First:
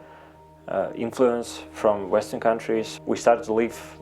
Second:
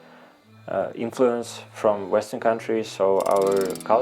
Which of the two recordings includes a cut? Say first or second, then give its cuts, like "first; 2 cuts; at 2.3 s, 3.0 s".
first; 1 cut; at 2.9 s